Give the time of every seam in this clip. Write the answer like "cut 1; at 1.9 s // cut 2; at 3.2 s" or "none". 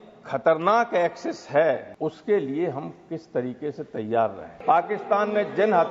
cut 1; at 1.9 s // cut 2; at 4.5 s